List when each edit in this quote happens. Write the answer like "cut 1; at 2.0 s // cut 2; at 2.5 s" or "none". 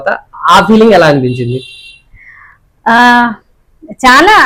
none